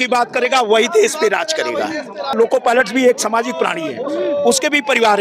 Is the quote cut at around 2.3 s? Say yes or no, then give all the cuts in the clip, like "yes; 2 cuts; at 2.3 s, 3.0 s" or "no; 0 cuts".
yes; 1 cut; at 2.3 s